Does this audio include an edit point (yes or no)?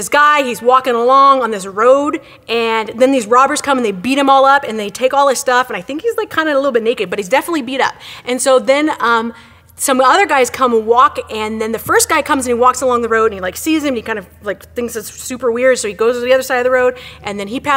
yes